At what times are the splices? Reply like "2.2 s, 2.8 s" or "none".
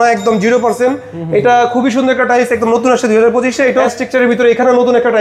3.8 s